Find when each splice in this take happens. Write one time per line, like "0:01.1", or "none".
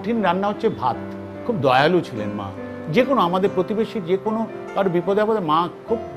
0:01.4
0:02.8